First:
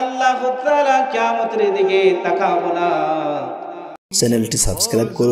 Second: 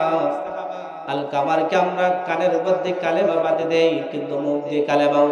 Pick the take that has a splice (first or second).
first